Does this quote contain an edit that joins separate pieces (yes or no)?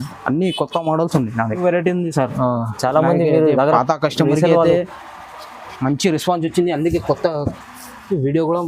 yes